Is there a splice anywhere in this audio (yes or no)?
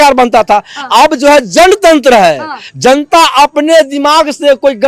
no